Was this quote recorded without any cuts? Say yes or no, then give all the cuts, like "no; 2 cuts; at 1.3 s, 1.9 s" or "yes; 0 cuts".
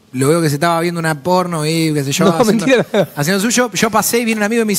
yes; 0 cuts